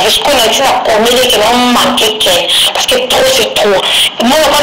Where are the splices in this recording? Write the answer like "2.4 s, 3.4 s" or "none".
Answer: none